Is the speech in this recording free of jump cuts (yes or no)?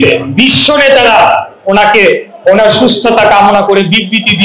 yes